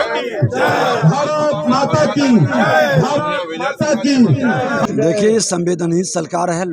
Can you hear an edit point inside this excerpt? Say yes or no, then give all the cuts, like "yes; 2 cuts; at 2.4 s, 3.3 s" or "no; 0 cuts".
yes; 1 cut; at 4.9 s